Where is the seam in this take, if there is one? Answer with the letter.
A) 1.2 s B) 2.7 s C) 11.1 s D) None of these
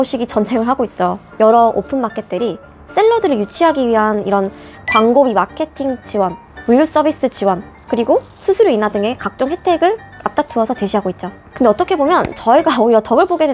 A